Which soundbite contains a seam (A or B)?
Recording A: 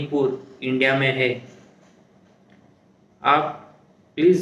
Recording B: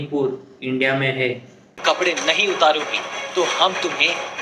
B